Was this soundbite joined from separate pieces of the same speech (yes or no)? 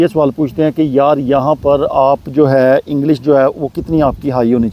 no